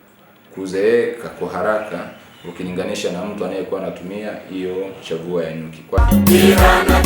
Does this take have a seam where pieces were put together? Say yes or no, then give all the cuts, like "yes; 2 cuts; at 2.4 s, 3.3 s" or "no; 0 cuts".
yes; 1 cut; at 6.0 s